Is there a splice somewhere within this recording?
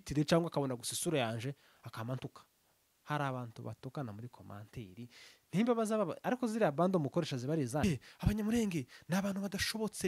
yes; 1 cut; at 7.8 s

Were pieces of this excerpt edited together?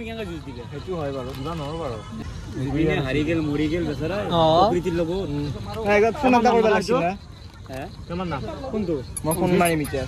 yes; 1 cut; at 2.2 s

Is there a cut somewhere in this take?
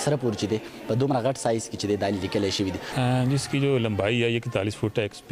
yes; 1 cut; at 2.9 s

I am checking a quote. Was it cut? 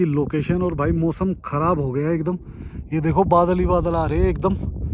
no; 0 cuts

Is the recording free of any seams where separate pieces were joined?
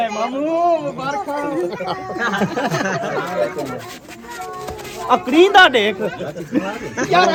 yes; 0 cuts

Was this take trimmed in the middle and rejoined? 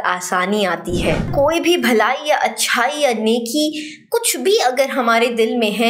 yes; 1 cut; at 1.3 s

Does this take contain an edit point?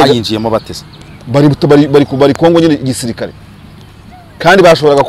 no; 0 cuts

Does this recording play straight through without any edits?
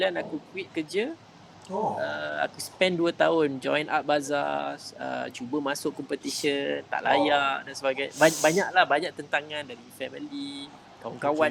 yes; 0 cuts

